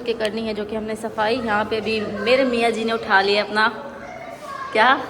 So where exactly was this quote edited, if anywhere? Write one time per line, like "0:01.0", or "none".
none